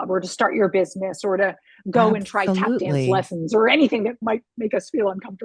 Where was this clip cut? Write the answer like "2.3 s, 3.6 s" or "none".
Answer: 4.2 s